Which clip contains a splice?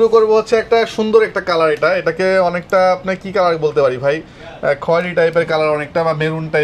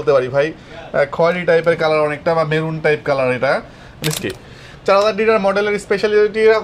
second; 1 cut; at 4.1 s

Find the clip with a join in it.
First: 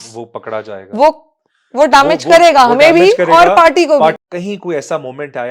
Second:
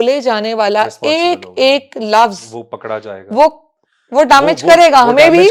first; 1 cut; at 4.2 s

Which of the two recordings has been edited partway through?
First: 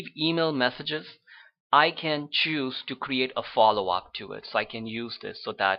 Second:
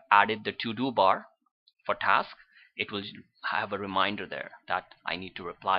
second; 1 cut; at 1.3 s

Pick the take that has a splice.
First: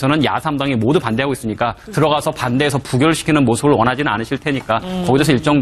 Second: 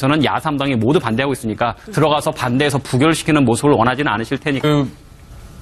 first; 1 cut; at 4.6 s

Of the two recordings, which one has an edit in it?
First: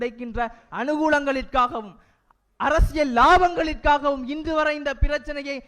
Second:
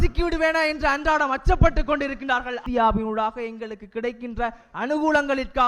second; 1 cut; at 2.6 s

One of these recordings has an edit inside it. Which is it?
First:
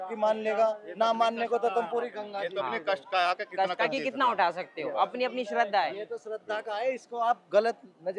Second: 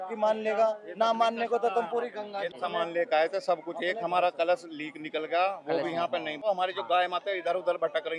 second; 2 cuts; at 2.5 s, 6.4 s

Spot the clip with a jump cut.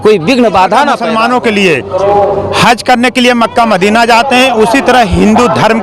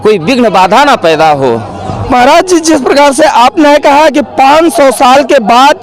first; 1 cut; at 1.0 s

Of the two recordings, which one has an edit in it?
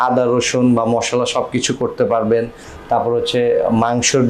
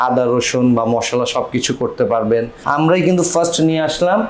second; 1 cut; at 2.6 s

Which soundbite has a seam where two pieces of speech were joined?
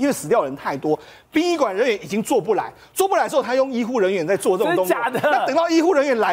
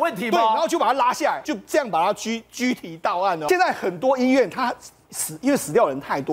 second; 2 cuts; at 1.4 s, 3.4 s

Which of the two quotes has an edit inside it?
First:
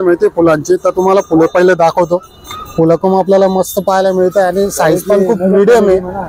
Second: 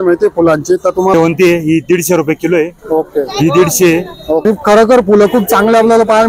second; 2 cuts; at 1.1 s, 4.4 s

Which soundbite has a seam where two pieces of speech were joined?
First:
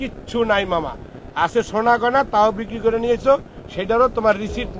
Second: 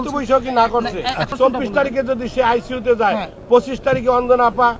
second; 1 cut; at 1.3 s

